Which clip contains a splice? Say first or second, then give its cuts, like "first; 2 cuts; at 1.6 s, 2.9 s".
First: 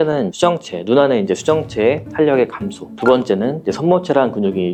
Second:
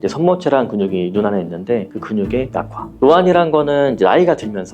second; 1 cut; at 2.8 s